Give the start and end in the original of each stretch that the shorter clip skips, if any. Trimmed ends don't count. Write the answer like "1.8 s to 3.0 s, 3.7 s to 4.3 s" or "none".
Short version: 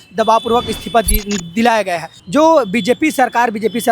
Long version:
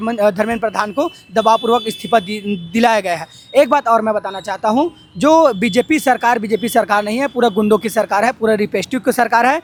3.3 s to 5.0 s